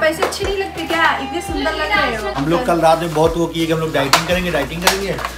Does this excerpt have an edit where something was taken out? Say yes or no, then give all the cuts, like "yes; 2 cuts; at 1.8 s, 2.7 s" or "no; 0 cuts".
yes; 1 cut; at 2.4 s